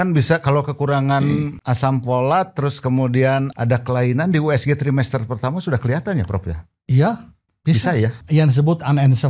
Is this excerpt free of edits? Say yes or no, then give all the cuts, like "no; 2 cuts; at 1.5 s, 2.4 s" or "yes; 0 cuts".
no; 3 cuts; at 1.6 s, 3.5 s, 8.2 s